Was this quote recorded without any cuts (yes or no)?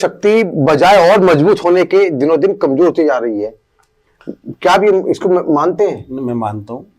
yes